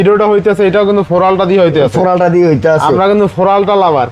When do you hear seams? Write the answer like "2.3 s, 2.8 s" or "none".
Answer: none